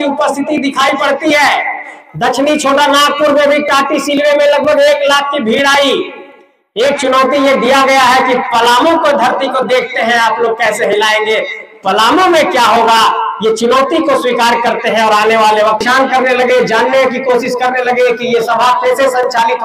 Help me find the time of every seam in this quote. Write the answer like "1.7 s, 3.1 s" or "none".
15.8 s

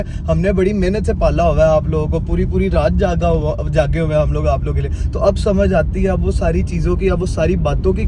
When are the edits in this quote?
none

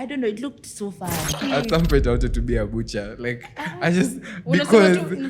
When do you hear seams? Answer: 1.4 s

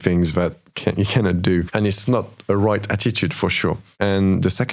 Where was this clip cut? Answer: 1.7 s, 3.9 s

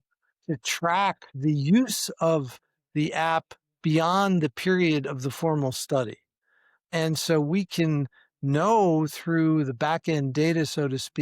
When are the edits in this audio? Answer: 1.3 s, 6.9 s

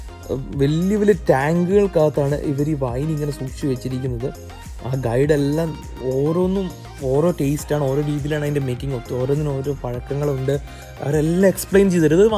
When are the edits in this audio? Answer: none

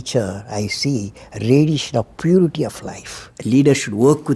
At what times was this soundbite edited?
3.3 s

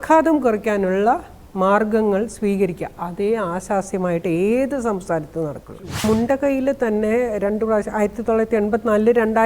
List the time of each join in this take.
5.7 s

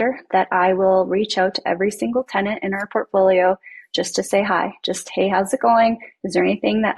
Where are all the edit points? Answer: none

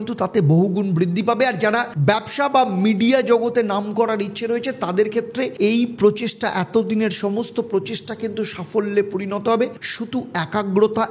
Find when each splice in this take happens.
none

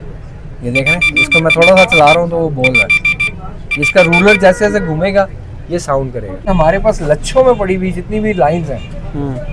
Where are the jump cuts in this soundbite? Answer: 6.4 s

